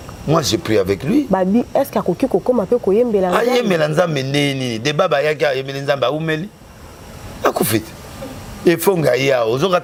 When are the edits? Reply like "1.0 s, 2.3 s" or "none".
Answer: none